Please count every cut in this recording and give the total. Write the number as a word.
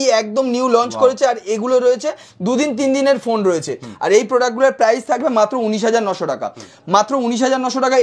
zero